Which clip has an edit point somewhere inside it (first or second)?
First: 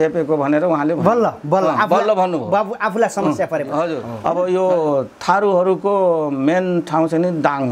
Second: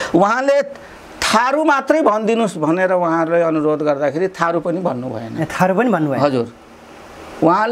first